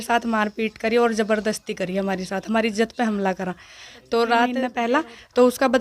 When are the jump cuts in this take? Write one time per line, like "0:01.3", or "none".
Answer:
0:04.7